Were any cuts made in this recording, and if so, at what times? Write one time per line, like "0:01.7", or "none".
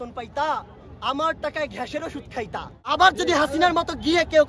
0:02.8